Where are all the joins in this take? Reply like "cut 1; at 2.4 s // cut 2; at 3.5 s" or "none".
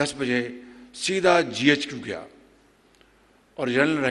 none